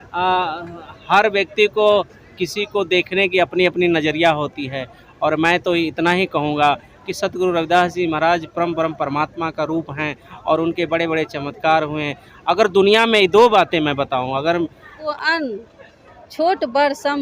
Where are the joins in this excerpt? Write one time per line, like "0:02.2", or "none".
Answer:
0:15.1